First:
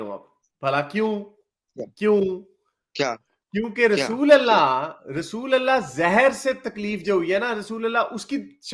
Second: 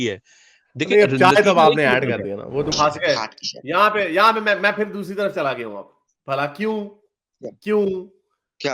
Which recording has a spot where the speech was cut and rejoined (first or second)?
second